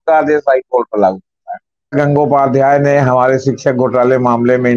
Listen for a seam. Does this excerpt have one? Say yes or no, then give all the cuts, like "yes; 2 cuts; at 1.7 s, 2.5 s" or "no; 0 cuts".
yes; 1 cut; at 1.9 s